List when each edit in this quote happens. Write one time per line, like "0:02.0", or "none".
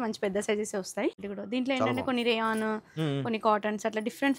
0:01.3

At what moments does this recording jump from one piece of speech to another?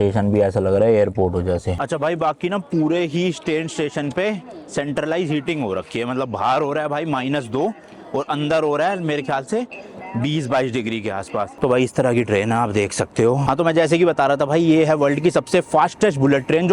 0:01.8
0:11.5
0:13.4

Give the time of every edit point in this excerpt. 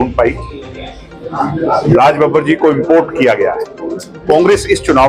none

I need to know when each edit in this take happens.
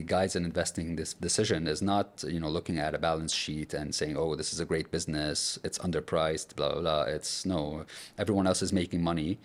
none

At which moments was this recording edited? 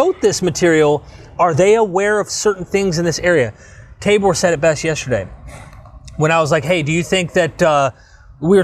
none

